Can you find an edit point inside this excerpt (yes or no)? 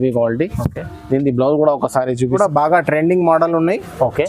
yes